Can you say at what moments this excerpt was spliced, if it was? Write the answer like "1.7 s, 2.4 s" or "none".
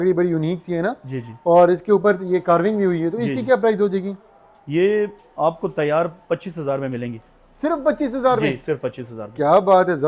none